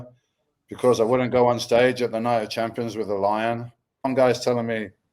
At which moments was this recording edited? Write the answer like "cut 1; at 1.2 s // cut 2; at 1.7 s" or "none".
cut 1; at 4.0 s

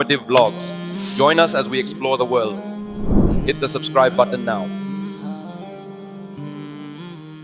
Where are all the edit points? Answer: none

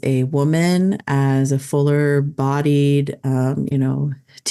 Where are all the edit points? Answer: none

